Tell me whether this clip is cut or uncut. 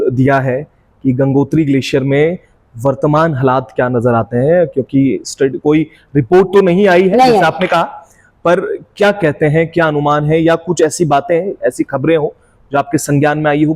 uncut